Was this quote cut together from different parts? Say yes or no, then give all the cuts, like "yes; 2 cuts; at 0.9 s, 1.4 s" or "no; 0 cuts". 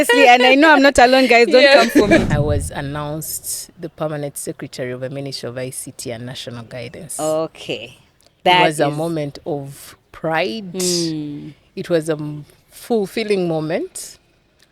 yes; 1 cut; at 2.2 s